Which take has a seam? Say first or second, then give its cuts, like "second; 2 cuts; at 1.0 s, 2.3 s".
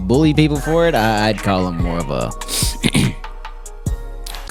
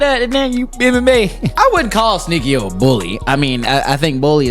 second; 2 cuts; at 1.4 s, 3.1 s